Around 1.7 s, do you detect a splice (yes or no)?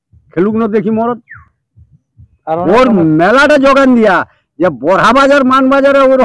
no